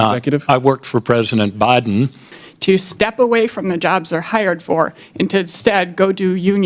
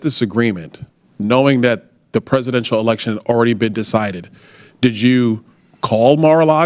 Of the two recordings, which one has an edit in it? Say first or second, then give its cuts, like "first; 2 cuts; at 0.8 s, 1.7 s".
first; 1 cut; at 2.3 s